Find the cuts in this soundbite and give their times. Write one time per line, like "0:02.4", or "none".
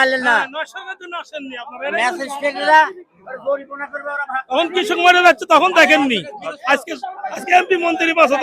none